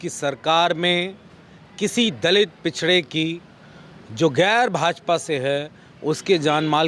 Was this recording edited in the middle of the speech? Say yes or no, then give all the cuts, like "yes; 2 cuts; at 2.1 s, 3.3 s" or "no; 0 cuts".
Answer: no; 0 cuts